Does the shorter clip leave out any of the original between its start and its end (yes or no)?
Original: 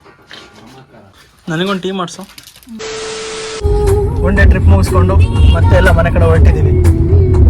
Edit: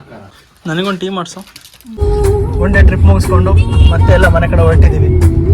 yes